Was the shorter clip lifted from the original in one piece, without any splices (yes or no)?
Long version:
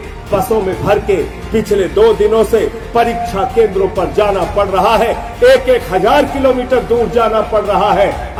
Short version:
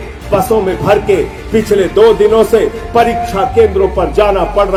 yes